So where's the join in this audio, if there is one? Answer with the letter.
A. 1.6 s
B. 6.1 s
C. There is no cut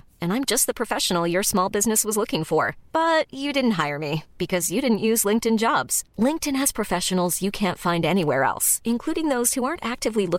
C